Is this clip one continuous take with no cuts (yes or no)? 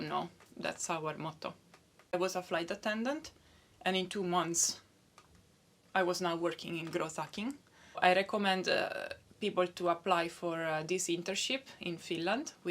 no